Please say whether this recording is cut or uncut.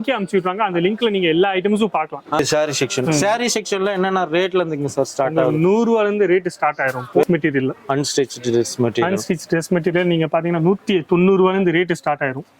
cut